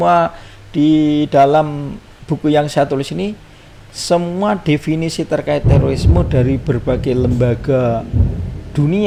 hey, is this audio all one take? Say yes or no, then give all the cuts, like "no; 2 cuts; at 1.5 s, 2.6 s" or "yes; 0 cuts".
yes; 0 cuts